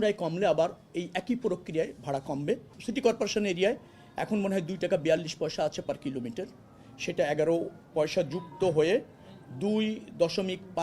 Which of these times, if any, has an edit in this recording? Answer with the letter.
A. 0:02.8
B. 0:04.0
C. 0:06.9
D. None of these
A